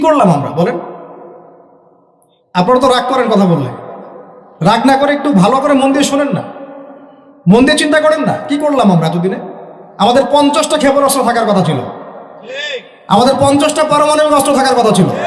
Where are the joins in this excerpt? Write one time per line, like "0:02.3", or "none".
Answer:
none